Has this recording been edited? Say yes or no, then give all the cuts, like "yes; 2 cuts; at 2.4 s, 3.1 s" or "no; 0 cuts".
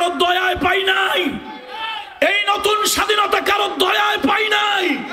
no; 0 cuts